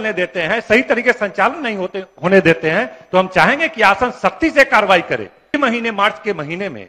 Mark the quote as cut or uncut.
cut